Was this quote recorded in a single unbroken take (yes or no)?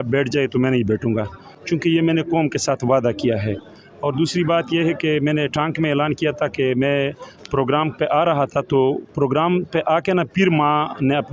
yes